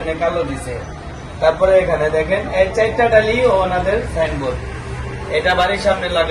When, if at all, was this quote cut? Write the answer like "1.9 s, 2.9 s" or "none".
none